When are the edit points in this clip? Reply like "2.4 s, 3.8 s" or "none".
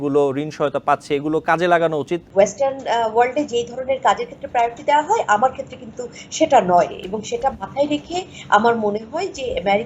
2.2 s